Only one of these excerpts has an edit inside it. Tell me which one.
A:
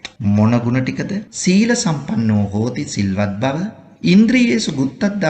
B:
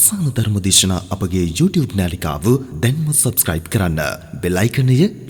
A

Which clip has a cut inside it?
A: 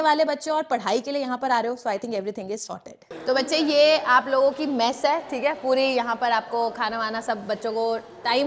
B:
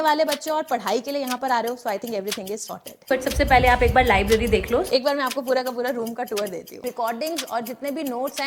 B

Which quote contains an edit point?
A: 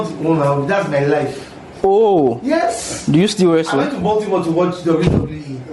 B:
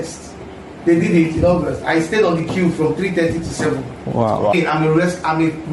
B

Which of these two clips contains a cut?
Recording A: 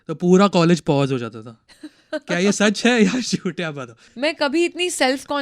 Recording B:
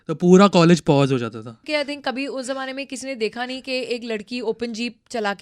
B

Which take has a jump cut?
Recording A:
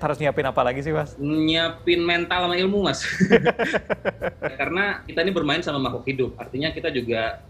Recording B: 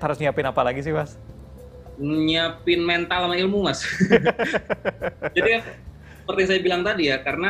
A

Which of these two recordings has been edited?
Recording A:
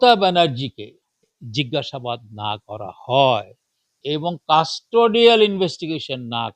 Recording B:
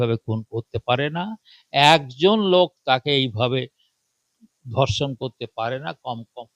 A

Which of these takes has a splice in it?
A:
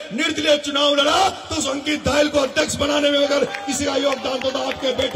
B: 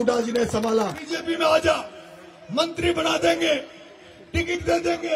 B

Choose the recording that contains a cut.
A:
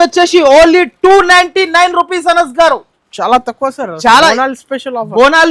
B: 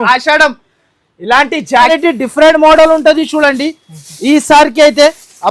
B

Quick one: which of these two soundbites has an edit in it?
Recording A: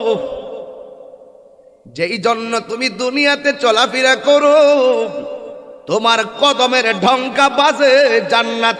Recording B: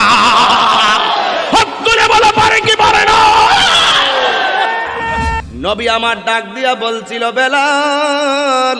B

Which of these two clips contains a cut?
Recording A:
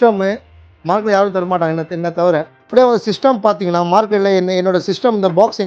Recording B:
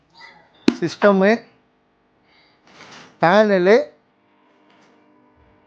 A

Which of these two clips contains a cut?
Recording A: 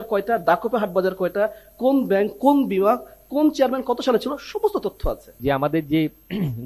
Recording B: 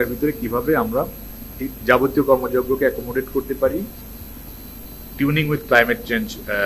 A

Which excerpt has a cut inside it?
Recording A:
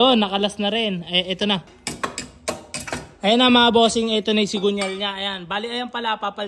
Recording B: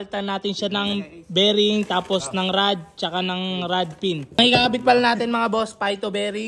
B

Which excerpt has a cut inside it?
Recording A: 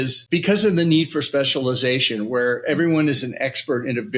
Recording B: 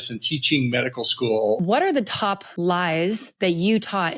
B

